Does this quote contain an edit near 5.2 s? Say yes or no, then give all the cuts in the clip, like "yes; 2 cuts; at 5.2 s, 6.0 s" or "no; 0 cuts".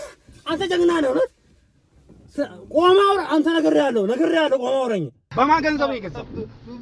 yes; 1 cut; at 5.2 s